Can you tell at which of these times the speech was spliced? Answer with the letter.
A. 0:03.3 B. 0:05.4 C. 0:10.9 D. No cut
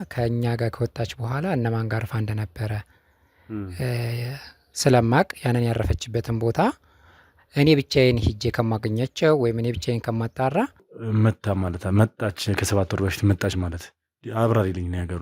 C